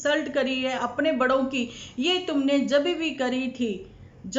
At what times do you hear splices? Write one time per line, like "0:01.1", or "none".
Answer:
none